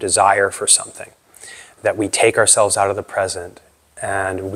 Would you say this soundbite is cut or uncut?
uncut